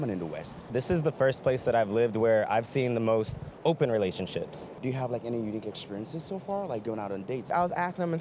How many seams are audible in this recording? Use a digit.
3